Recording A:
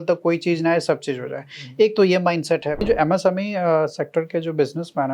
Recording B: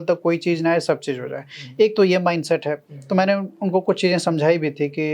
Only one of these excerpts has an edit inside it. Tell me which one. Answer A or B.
A